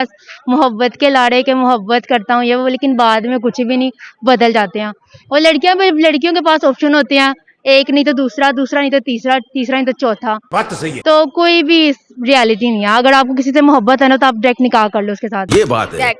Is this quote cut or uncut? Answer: uncut